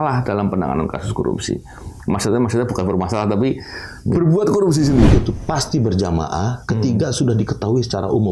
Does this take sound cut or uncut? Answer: cut